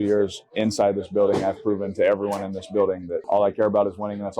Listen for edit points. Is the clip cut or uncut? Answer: cut